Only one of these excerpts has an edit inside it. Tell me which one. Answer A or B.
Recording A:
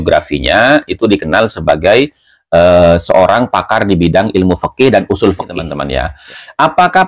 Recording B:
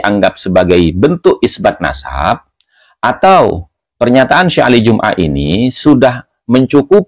A